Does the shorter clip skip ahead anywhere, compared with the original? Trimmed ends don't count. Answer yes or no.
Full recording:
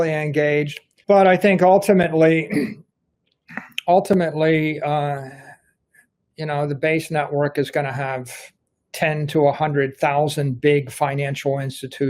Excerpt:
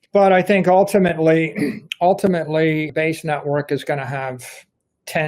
yes